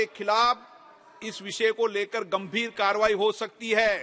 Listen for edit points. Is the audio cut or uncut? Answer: uncut